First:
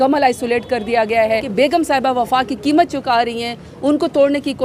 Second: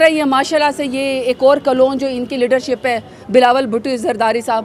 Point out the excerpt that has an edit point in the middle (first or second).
first